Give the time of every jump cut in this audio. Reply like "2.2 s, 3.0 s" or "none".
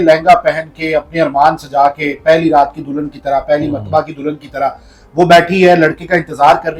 none